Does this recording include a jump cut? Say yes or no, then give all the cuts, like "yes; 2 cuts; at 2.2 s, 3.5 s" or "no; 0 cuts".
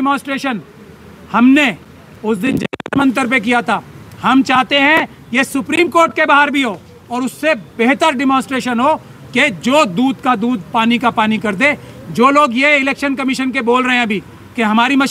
no; 0 cuts